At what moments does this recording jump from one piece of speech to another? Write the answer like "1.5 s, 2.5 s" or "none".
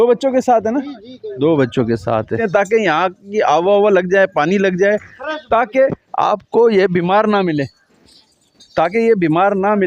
2.4 s